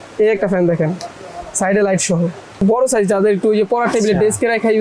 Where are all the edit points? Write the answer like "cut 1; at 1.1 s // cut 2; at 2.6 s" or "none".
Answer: cut 1; at 2.6 s